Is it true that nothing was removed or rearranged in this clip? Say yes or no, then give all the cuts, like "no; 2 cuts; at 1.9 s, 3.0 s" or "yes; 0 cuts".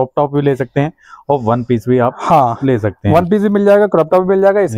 yes; 0 cuts